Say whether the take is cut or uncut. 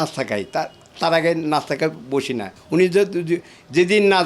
cut